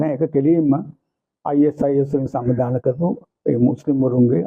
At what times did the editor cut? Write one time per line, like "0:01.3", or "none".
none